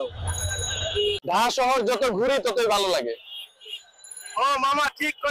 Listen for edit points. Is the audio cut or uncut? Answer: cut